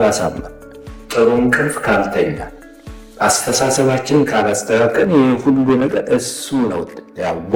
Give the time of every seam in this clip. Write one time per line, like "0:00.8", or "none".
none